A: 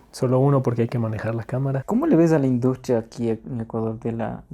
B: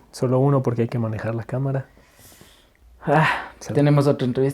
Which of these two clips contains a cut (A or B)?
A